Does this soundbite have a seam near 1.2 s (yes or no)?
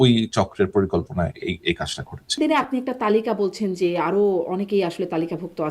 no